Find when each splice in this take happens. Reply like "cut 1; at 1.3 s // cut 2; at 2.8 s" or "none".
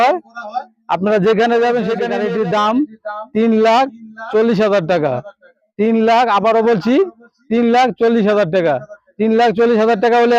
cut 1; at 2.1 s